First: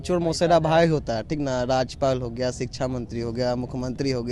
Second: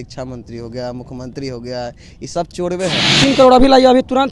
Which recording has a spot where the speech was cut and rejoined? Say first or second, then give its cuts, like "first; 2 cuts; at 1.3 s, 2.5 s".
second; 1 cut; at 3.2 s